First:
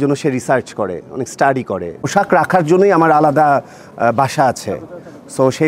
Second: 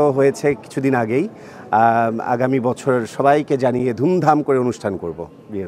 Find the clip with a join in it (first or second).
first